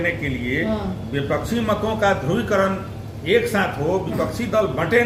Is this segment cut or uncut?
uncut